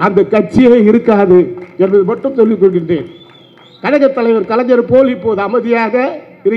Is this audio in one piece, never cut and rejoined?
yes; 0 cuts

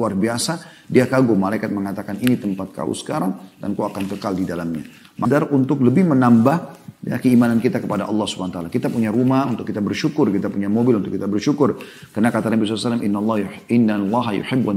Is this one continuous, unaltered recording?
no; 1 cut; at 5.3 s

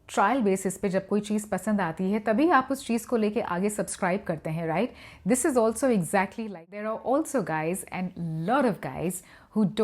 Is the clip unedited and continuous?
no; 1 cut; at 6.6 s

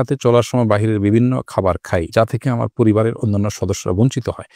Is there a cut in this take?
no; 0 cuts

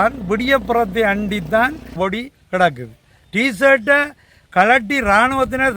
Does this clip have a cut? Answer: yes; 1 cut; at 2.0 s

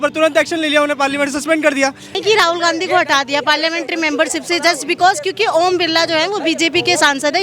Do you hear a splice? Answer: yes; 1 cut; at 2.1 s

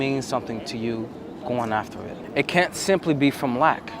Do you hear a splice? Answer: yes; 1 cut; at 2.2 s

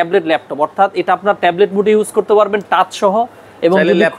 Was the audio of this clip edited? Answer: no; 0 cuts

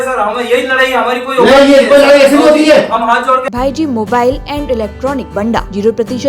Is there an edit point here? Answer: yes; 2 cuts; at 3.5 s, 5.4 s

